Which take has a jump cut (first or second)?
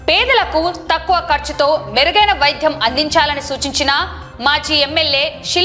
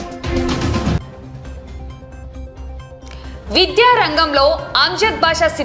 second